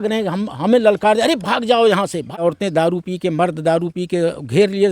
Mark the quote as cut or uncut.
cut